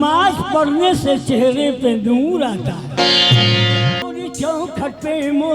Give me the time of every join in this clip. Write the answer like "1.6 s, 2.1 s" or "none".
4.0 s